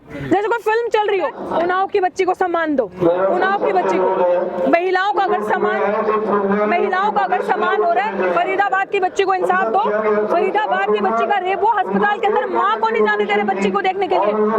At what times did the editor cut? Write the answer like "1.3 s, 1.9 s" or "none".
1.4 s